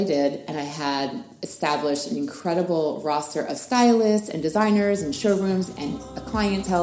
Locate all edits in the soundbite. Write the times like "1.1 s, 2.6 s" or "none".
none